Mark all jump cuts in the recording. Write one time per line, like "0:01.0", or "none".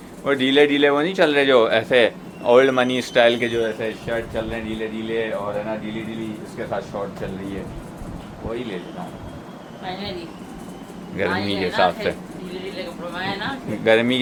none